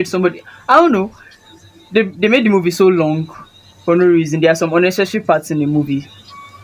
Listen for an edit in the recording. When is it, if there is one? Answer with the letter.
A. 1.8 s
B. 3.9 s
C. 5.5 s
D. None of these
D